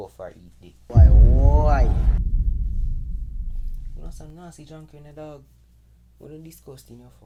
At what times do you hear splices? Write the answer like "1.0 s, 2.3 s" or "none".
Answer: none